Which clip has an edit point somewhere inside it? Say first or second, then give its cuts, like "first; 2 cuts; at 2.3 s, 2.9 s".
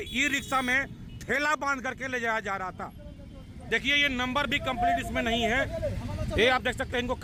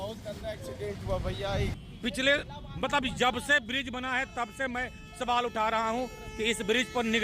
second; 1 cut; at 1.5 s